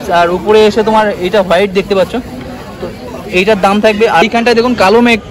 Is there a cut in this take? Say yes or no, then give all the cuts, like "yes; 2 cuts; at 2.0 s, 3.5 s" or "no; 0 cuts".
yes; 1 cut; at 4.2 s